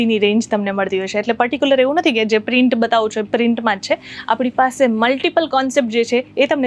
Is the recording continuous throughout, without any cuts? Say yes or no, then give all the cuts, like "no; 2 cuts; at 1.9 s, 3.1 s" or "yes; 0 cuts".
yes; 0 cuts